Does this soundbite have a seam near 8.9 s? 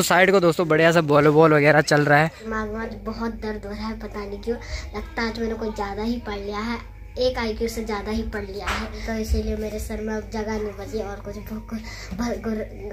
yes; 2 cuts; at 2.4 s, 8.9 s

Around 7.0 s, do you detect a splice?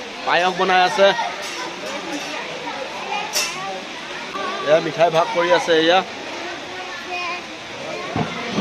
no; 1 cut; at 4.3 s

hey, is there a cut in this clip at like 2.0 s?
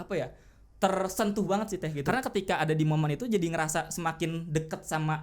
yes; 1 cut; at 2.0 s

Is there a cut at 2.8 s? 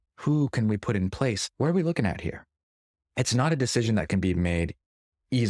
no; 1 cut; at 1.5 s

